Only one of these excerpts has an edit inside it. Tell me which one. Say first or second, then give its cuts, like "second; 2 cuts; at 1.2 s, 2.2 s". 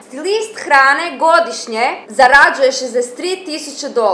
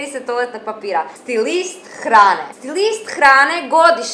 second; 1 cut; at 1.1 s